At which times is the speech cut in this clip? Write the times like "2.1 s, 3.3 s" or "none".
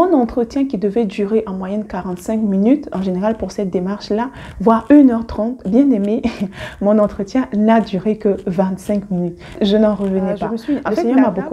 9.5 s, 10.7 s